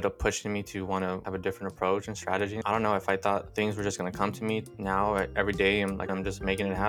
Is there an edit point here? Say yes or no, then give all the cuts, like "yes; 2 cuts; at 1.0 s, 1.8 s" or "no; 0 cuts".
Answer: yes; 5 cuts; at 1.3 s, 2.6 s, 3.5 s, 4.6 s, 6.1 s